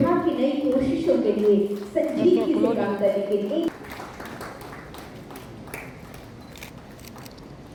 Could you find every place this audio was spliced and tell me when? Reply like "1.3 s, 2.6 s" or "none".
none